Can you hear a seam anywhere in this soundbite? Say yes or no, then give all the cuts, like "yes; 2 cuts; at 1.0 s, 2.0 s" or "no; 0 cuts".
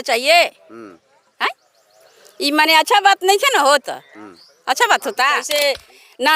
yes; 1 cut; at 5.5 s